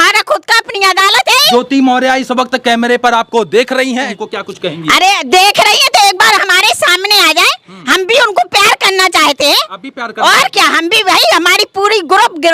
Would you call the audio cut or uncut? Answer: cut